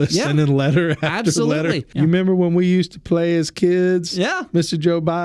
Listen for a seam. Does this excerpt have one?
yes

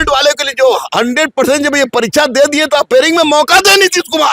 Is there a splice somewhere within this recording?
no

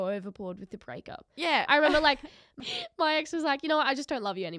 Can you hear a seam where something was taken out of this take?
yes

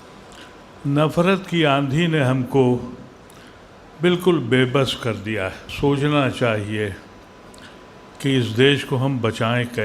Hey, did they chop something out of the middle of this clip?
yes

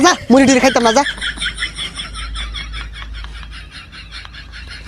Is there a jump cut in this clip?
yes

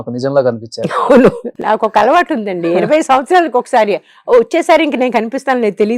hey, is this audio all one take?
no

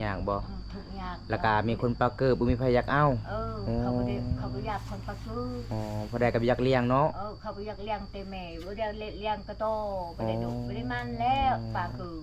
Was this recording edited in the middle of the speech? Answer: no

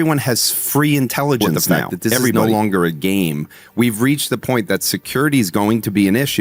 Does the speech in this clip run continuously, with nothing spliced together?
no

